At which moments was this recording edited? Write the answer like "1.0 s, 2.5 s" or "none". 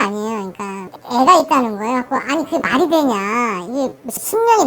1.0 s